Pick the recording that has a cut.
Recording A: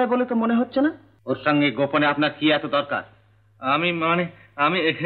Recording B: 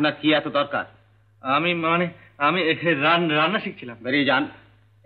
A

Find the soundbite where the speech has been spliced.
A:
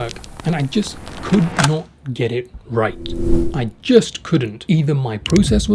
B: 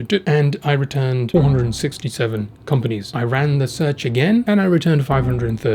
B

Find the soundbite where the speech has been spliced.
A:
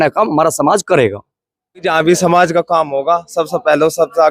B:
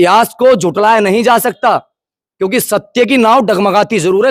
A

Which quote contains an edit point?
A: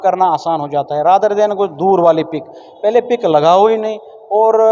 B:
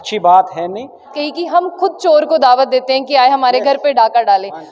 B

